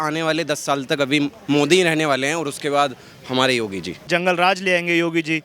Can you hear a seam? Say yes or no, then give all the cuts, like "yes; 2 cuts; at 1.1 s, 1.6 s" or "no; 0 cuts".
yes; 1 cut; at 4.1 s